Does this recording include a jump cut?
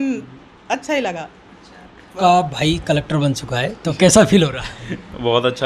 yes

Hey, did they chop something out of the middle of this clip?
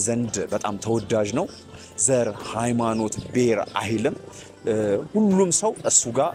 no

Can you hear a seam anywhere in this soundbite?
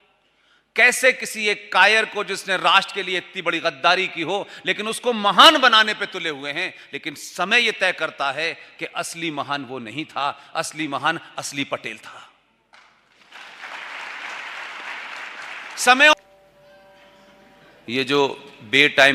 yes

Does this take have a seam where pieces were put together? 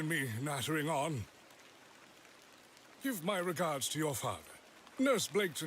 yes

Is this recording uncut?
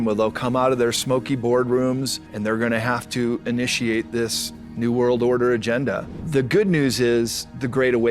no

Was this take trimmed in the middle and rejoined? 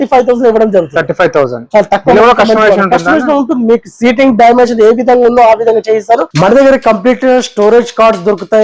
yes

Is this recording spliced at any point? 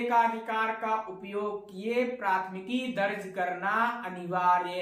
no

